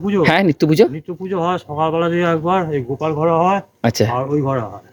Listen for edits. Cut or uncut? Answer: uncut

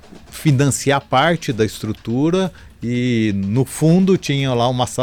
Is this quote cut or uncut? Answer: uncut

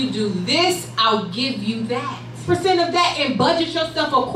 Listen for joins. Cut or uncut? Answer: cut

